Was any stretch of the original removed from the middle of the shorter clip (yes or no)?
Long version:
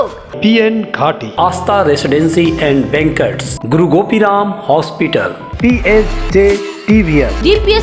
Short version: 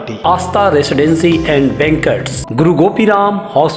no